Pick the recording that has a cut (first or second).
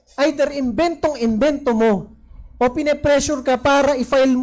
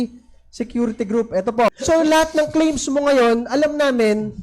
second